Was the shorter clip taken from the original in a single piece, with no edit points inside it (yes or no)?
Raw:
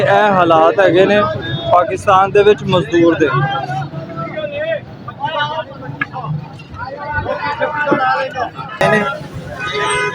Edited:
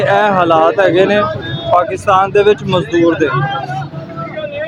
yes